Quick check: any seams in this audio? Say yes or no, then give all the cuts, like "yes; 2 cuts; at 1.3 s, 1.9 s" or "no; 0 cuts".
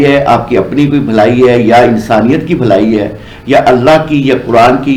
no; 0 cuts